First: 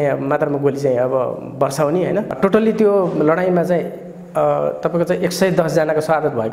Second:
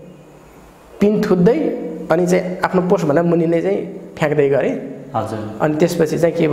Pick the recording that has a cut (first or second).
first